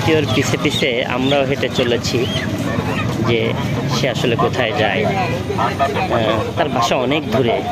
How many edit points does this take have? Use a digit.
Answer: 0